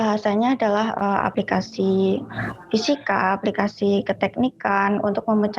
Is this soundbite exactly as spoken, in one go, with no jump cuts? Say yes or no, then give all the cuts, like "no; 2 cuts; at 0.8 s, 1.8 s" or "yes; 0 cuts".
no; 1 cut; at 1.3 s